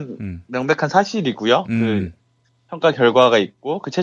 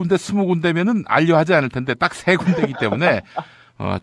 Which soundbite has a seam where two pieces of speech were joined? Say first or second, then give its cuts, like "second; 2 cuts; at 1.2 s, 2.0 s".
first; 1 cut; at 1.8 s